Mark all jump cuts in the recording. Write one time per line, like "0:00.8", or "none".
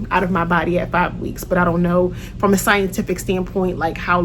none